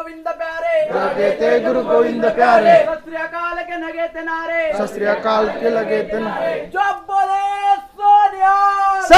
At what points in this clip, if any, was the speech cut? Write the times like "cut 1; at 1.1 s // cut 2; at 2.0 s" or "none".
none